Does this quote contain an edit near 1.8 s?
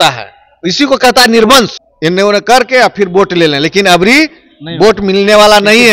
yes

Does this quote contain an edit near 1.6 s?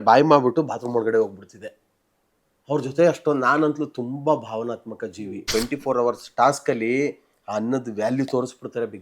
no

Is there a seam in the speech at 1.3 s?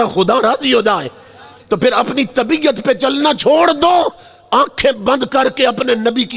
no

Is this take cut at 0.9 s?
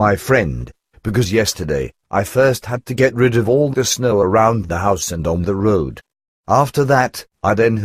no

